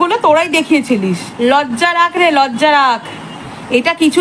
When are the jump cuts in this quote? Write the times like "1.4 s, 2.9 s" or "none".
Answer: 1.3 s

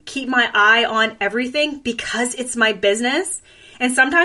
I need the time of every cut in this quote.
none

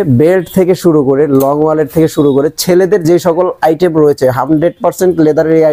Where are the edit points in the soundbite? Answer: none

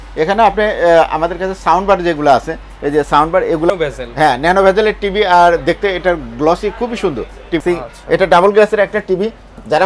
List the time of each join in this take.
3.7 s, 7.6 s

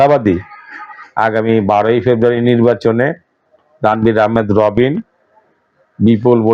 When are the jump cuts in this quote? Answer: none

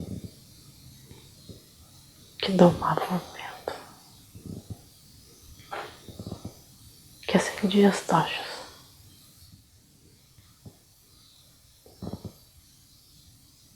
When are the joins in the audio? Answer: 1.6 s

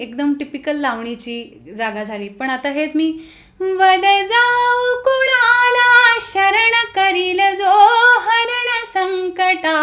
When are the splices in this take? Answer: none

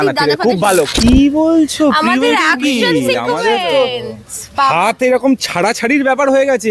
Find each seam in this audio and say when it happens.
0.9 s

